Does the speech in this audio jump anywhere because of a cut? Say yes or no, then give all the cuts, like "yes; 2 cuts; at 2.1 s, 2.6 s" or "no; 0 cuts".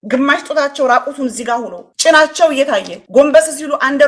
yes; 2 cuts; at 1.8 s, 3.0 s